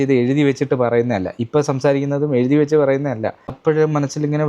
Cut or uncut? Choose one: cut